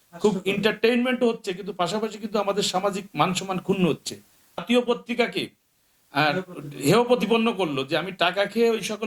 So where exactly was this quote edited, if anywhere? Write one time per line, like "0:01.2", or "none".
0:04.6